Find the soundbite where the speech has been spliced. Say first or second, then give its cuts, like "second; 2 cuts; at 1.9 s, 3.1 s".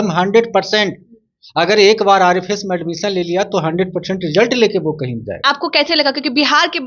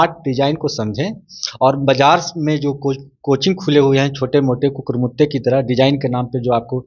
first; 1 cut; at 5.4 s